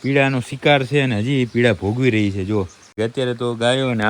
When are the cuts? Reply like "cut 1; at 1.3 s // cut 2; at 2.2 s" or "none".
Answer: cut 1; at 2.8 s